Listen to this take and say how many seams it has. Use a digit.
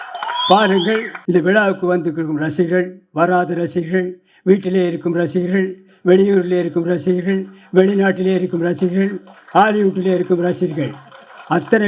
1